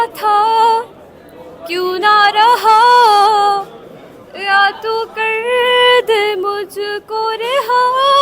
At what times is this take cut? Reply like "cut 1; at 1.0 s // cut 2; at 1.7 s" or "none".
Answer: none